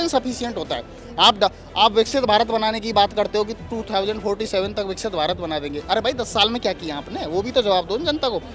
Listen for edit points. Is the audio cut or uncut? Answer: uncut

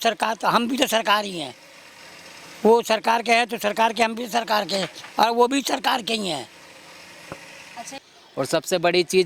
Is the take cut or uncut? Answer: cut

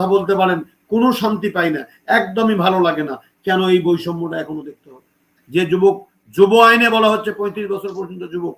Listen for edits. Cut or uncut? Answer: cut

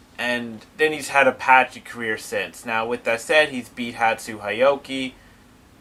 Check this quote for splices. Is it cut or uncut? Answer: uncut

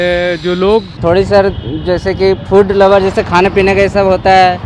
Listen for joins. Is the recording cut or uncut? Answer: cut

